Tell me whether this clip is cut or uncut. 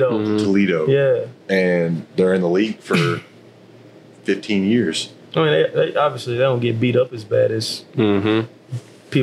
uncut